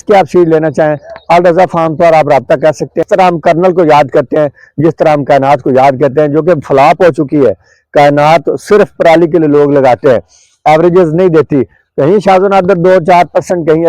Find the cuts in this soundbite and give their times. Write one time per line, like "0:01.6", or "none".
0:03.0